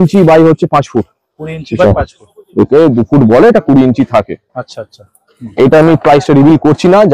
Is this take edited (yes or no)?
no